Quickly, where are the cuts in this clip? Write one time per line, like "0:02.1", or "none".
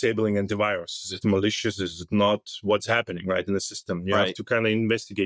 none